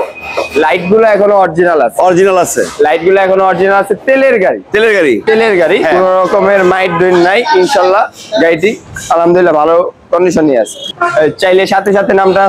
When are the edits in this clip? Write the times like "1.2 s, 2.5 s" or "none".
5.9 s, 10.8 s